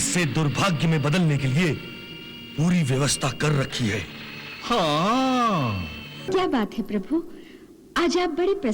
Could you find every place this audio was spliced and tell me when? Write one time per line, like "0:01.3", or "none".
0:06.3